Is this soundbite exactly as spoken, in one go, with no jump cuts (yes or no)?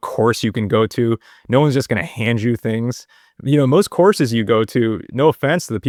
yes